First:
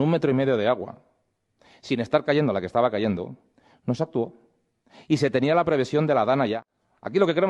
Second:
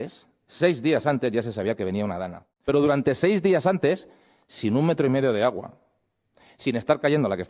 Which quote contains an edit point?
first; 1 cut; at 4.5 s

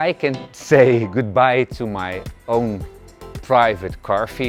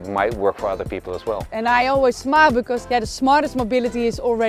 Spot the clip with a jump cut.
second; 2 cuts; at 1.5 s, 2.8 s

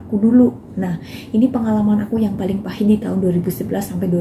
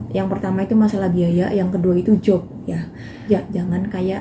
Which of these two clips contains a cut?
second; 1 cut; at 3.1 s

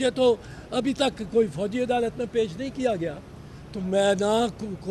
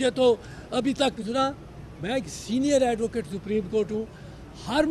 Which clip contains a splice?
second; 1 cut; at 1.3 s

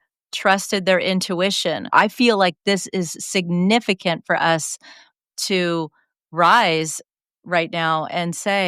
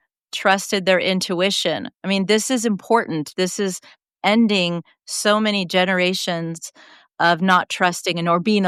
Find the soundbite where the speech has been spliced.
first; 1 cut; at 1.9 s

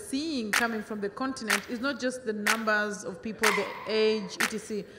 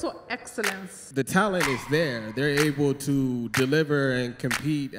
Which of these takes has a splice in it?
second; 1 cut; at 1.0 s

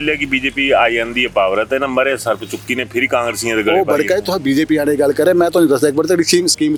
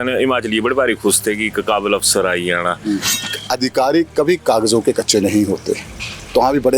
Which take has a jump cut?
second; 1 cut; at 3.2 s

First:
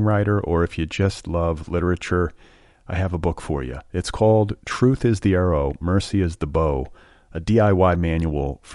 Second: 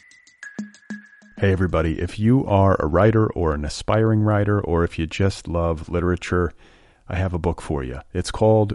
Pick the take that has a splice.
second; 1 cut; at 0.9 s

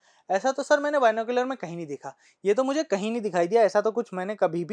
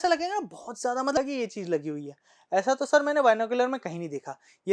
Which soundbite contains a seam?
second; 1 cut; at 1.2 s

